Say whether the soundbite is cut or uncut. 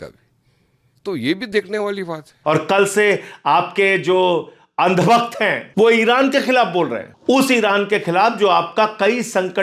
cut